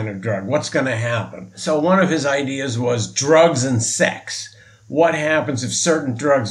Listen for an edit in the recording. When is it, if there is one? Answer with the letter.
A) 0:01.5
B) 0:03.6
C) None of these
A